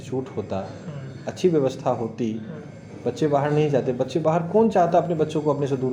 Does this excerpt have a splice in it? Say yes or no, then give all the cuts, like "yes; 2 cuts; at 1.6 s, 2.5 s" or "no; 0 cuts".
no; 0 cuts